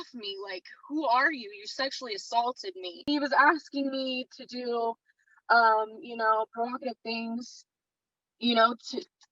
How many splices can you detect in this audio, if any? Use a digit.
1